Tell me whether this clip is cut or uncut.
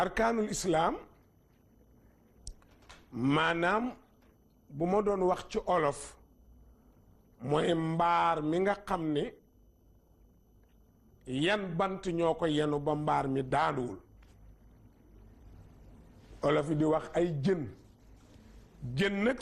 cut